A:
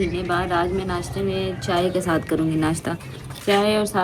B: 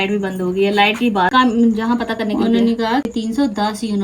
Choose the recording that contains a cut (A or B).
B